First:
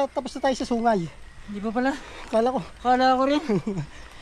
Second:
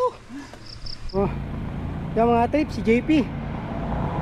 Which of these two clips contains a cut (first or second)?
second